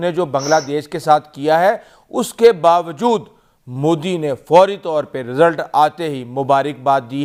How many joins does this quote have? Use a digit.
0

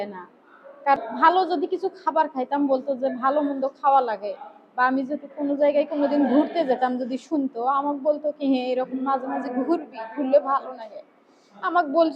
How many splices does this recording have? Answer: 1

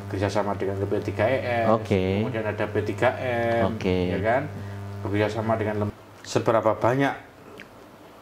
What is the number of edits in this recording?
1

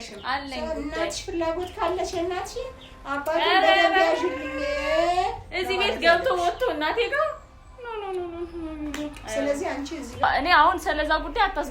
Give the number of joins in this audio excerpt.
1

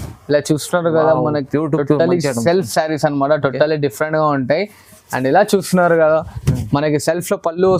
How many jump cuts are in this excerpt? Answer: 0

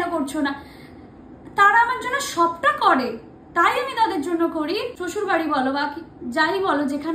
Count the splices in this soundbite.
1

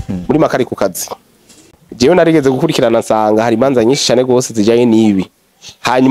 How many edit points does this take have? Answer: 1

